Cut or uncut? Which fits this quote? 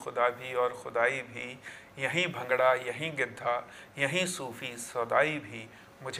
uncut